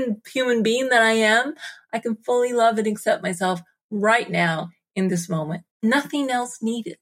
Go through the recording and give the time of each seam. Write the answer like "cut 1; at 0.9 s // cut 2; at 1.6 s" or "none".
cut 1; at 5.8 s